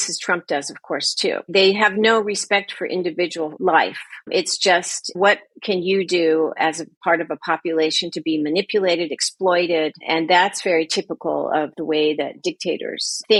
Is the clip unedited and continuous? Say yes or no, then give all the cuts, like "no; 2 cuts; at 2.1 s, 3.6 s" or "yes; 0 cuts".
yes; 0 cuts